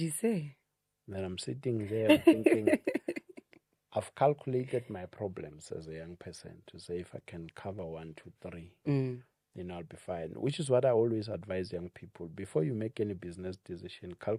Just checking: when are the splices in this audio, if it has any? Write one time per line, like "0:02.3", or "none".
none